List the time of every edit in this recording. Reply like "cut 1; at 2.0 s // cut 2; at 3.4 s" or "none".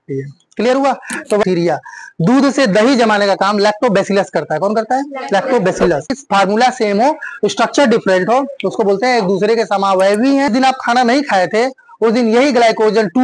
cut 1; at 1.4 s // cut 2; at 6.2 s // cut 3; at 10.5 s